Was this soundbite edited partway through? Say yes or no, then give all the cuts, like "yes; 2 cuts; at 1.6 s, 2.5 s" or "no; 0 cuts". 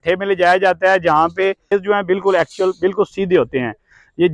yes; 1 cut; at 1.7 s